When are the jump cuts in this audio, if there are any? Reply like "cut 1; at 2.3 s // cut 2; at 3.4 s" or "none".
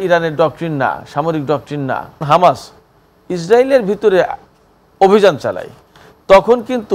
cut 1; at 2.2 s